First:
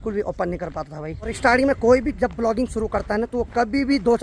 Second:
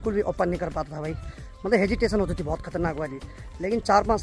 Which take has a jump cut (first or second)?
first